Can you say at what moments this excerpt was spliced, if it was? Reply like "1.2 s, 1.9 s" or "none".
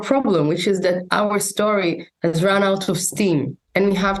none